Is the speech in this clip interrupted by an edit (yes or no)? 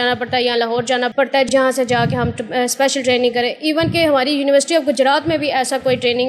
no